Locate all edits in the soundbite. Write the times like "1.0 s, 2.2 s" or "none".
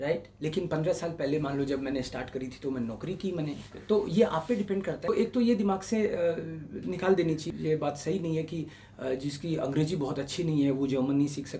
5.0 s, 7.4 s